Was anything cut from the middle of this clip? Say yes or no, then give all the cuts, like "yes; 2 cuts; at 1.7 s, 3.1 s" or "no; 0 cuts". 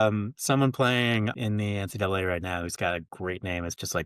yes; 1 cut; at 1.4 s